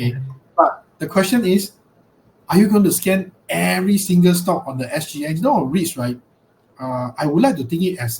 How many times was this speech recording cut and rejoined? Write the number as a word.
one